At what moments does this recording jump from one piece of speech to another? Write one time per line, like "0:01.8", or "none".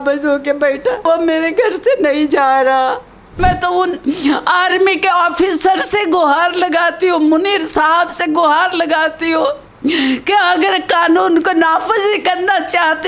0:01.0
0:03.4